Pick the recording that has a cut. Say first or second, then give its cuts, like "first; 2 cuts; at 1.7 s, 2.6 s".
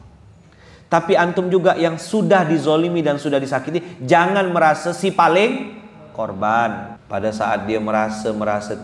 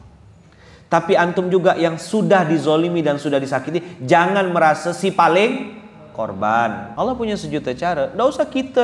first; 1 cut; at 6.9 s